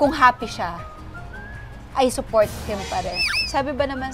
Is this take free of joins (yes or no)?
no